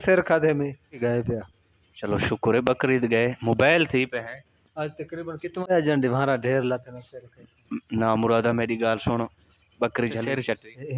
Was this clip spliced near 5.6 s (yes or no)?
yes